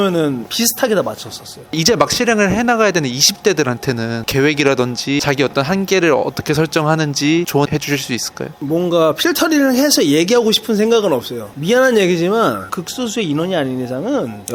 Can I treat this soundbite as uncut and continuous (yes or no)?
no